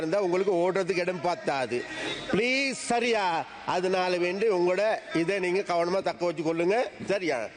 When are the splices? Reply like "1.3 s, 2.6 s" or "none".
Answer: none